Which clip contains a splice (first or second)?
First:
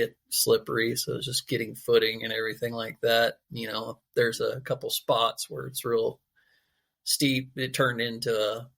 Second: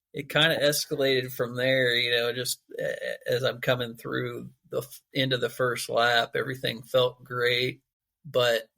second